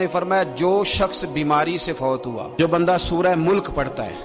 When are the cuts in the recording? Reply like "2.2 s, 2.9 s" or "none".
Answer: 2.5 s